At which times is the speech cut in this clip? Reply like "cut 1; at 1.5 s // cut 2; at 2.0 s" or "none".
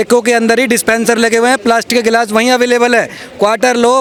none